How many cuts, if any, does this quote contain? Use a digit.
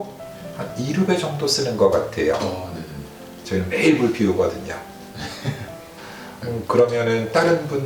0